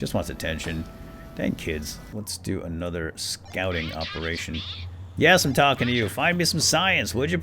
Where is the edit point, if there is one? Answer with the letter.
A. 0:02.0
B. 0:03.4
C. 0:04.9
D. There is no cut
A